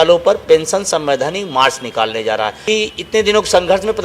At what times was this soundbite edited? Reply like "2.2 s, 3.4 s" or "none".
2.6 s